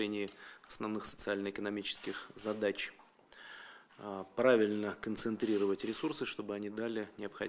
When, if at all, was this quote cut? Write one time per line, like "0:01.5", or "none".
0:04.8